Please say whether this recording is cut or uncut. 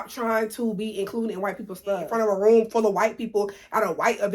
cut